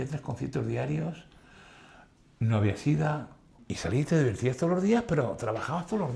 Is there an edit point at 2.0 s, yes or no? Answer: no